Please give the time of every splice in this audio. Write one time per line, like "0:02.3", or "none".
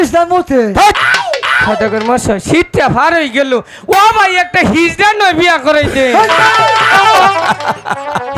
0:01.6